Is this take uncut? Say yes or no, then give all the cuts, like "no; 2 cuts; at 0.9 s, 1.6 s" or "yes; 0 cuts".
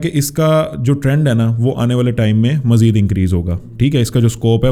yes; 0 cuts